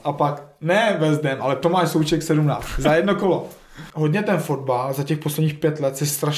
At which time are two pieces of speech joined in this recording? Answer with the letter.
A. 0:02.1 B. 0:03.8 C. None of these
B